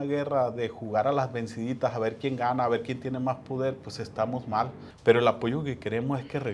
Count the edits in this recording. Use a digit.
1